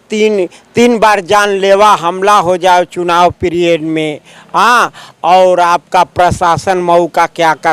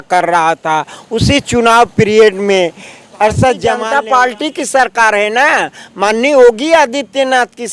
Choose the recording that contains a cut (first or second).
second